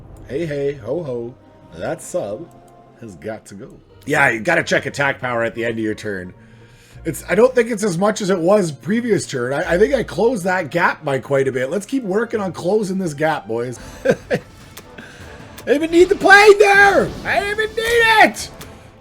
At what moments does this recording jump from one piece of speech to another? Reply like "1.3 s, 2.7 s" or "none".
3.9 s, 13.8 s